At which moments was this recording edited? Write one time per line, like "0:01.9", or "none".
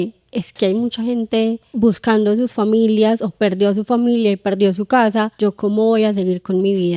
0:01.7
0:05.3